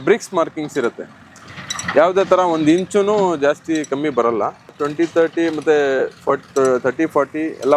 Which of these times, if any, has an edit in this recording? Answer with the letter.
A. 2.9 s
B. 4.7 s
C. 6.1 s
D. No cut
B